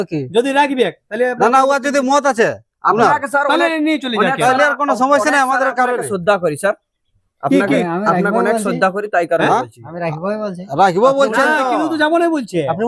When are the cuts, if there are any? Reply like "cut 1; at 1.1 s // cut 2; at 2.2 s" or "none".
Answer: none